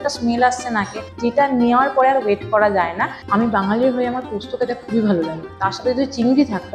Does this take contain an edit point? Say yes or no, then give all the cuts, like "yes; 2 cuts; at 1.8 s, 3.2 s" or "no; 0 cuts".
yes; 2 cuts; at 3.2 s, 5.4 s